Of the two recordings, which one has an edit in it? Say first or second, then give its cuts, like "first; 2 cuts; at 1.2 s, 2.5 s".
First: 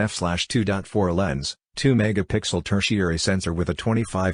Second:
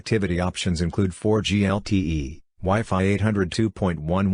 first; 2 cuts; at 1.1 s, 3.5 s